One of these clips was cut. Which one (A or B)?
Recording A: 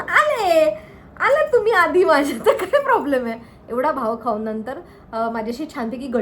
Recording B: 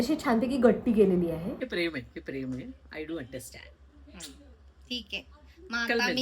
B